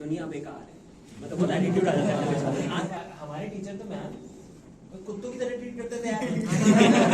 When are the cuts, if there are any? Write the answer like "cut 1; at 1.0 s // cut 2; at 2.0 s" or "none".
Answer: cut 1; at 2.9 s